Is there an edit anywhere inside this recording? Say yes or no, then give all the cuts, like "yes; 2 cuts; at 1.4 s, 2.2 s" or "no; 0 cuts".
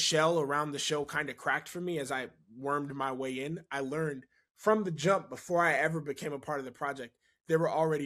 no; 0 cuts